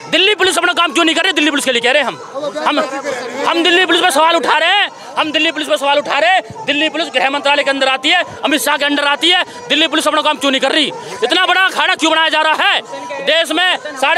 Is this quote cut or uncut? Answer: uncut